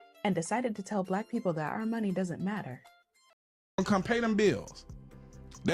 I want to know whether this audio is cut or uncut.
cut